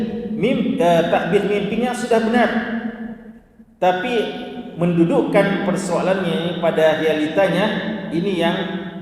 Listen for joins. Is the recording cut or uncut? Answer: uncut